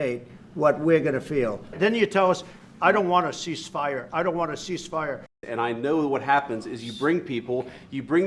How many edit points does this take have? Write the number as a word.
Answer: two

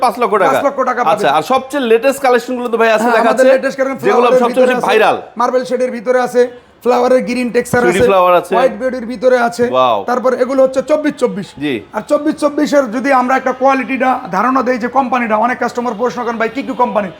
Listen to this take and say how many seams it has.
zero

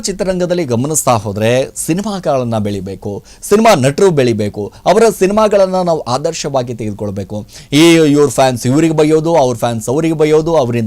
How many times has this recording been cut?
zero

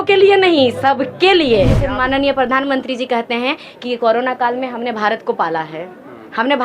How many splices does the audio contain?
one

